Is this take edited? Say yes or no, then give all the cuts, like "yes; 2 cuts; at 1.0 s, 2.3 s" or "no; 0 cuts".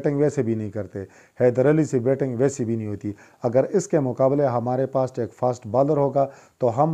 no; 0 cuts